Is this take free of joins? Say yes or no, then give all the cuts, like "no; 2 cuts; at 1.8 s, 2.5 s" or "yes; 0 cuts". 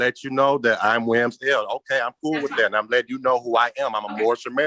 yes; 0 cuts